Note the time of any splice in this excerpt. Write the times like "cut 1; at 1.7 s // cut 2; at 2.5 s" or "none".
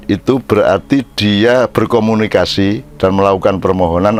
none